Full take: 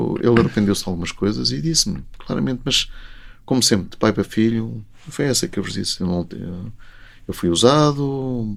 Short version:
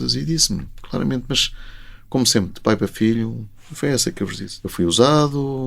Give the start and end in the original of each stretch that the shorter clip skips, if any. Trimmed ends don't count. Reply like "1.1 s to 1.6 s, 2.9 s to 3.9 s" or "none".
5.8 s to 7.1 s